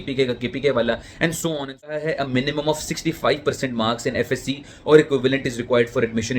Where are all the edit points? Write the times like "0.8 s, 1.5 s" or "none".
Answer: 2.0 s